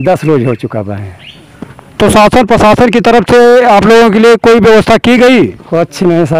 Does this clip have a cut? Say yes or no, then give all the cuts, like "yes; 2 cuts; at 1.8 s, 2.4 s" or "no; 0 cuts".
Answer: no; 0 cuts